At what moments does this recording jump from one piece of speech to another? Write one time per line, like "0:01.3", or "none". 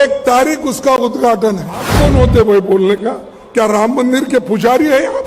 0:01.9